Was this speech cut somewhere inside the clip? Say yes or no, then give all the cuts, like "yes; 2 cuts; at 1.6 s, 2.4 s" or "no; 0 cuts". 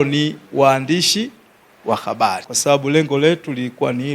yes; 1 cut; at 2.5 s